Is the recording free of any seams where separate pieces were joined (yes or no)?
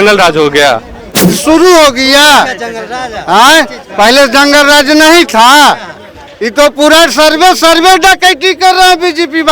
no